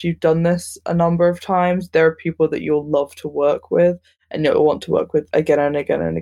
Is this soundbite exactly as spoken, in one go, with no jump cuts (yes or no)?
no